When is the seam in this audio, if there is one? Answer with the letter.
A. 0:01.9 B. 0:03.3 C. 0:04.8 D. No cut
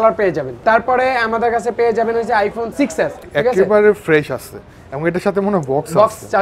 B